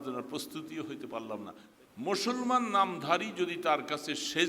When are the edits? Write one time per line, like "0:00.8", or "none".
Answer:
0:01.6